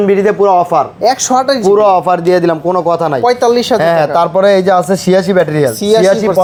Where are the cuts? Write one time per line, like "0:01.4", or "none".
none